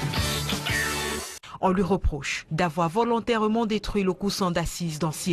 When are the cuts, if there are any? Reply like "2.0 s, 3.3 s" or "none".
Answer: 1.3 s

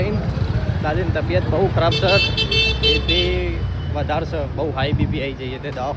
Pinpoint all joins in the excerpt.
none

